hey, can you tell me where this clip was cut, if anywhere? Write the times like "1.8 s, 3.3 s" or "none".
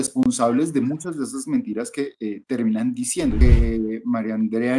3.4 s